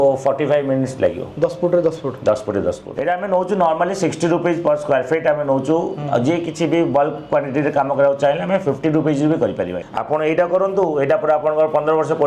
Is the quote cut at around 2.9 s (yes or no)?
yes